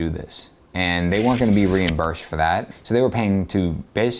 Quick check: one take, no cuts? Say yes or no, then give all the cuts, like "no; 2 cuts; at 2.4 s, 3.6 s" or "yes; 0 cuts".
no; 1 cut; at 2.7 s